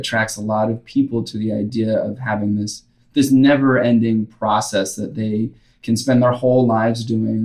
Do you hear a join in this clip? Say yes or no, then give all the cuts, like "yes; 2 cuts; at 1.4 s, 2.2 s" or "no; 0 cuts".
no; 0 cuts